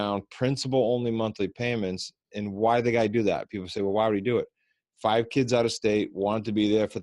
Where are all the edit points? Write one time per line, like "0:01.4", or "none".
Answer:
none